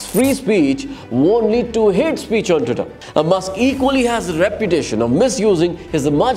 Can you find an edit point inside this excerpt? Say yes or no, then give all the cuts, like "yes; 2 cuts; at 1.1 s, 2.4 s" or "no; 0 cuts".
yes; 1 cut; at 2.9 s